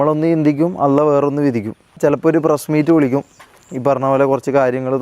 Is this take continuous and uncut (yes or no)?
no